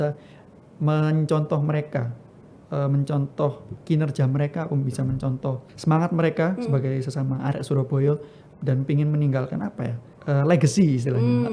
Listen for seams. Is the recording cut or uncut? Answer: cut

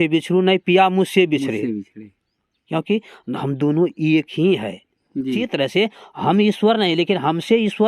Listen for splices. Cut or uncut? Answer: cut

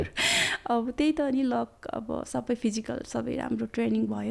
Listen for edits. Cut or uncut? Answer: uncut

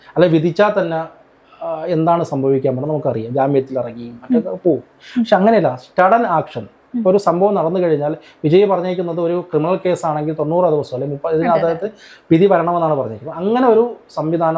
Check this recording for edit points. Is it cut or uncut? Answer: uncut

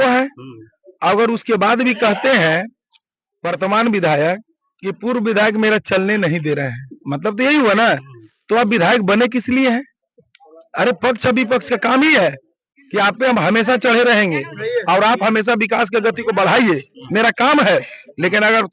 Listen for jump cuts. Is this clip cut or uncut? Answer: uncut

